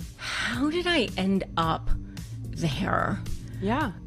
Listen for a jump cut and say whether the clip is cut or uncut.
uncut